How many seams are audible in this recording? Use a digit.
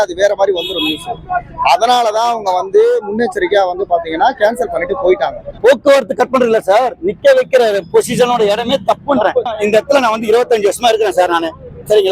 2